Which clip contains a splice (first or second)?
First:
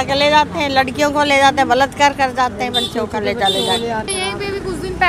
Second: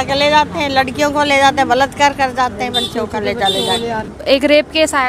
second